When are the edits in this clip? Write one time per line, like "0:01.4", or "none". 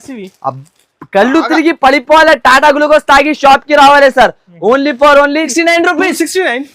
0:05.5